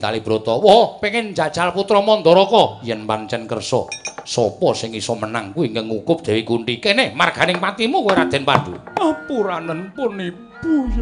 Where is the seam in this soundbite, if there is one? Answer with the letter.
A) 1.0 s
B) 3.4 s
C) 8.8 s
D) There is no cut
C